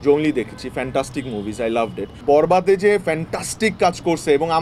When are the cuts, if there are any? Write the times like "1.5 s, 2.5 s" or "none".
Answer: 2.1 s